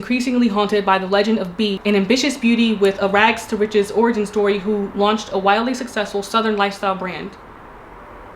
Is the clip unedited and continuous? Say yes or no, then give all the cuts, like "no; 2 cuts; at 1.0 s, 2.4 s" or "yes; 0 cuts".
no; 1 cut; at 1.8 s